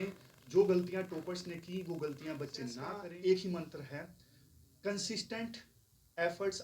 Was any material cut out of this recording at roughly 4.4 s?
no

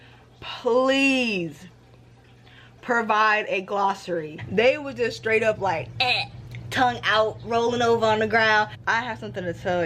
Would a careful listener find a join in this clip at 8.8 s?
yes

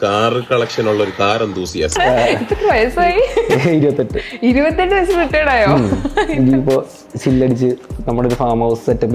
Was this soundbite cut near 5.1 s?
no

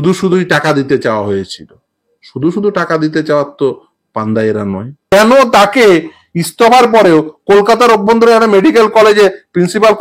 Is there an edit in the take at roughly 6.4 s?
no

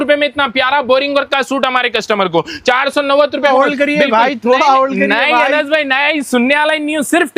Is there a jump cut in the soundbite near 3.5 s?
yes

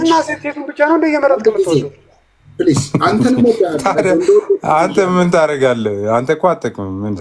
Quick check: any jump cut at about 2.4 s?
no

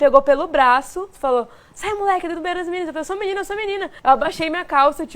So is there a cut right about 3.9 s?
yes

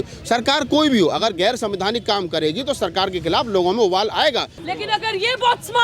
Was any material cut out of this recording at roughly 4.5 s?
yes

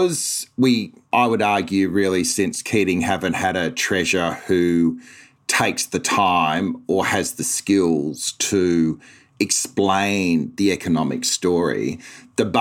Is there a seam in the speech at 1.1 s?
yes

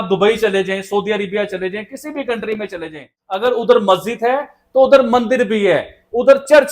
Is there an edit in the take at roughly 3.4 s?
yes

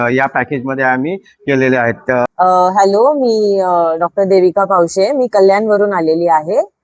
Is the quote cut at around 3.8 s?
no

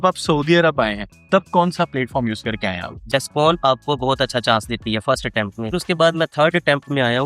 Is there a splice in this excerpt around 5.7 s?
yes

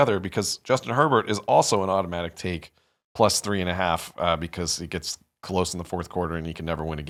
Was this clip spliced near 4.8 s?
no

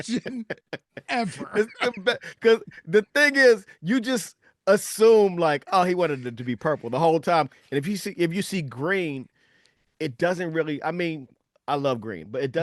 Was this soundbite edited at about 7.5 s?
yes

